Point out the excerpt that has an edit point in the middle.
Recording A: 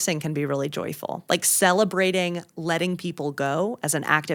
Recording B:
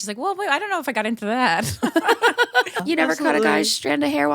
B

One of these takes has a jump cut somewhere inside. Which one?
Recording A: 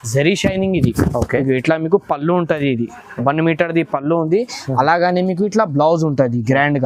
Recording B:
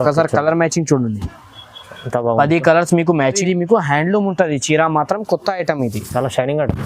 B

